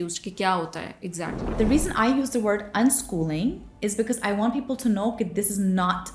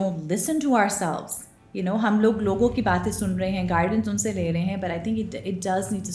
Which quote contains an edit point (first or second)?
first